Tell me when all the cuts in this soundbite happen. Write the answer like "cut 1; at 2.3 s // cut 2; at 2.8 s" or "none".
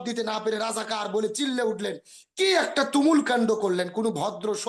none